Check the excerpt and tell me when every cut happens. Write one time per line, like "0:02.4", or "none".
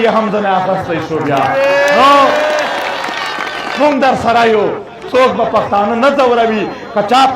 0:03.6
0:04.9